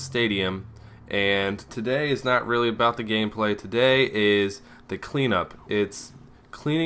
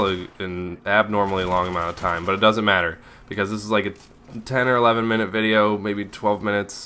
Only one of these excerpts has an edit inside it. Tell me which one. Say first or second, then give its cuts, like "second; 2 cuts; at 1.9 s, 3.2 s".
first; 1 cut; at 5.0 s